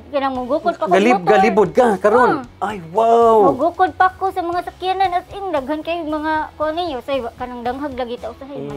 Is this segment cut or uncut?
cut